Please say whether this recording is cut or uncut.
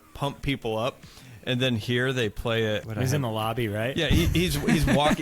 cut